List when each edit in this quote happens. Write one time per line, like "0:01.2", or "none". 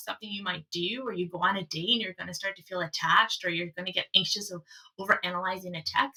none